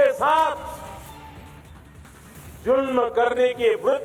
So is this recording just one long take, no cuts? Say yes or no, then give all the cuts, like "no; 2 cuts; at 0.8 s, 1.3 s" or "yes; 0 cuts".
yes; 0 cuts